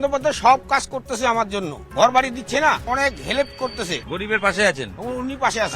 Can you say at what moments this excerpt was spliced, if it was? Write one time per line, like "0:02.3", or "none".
0:02.9